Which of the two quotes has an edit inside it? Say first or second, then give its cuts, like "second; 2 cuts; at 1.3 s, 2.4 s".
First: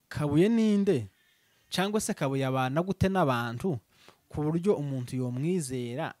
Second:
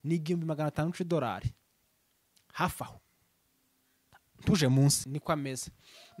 second; 1 cut; at 5.1 s